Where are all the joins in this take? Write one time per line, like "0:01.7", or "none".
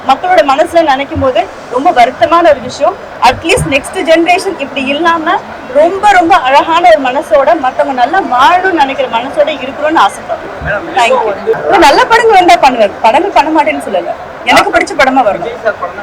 0:11.6